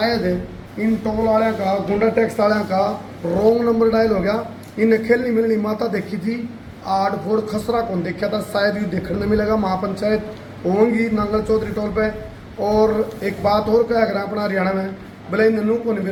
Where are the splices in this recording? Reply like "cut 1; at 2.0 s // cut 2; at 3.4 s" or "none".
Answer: none

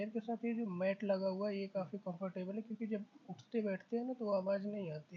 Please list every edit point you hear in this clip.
none

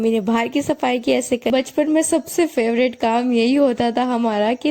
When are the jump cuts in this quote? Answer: cut 1; at 1.5 s

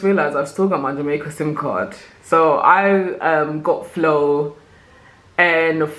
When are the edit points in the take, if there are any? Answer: none

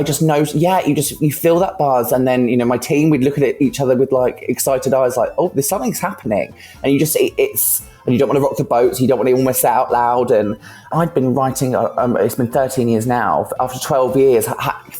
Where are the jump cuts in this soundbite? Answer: cut 1; at 10.9 s

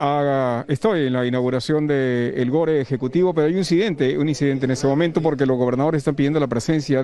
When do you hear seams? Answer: none

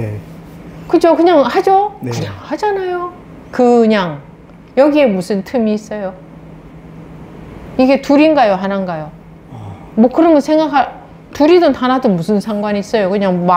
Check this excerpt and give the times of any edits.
none

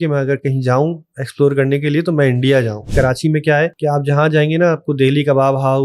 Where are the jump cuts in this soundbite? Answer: cut 1; at 2.9 s // cut 2; at 3.8 s

